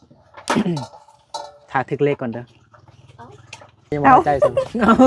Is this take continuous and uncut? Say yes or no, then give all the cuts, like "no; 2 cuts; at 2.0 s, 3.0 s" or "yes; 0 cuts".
yes; 0 cuts